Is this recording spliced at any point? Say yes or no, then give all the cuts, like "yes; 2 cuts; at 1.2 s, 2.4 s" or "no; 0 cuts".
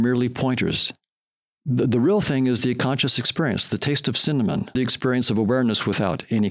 yes; 1 cut; at 4.8 s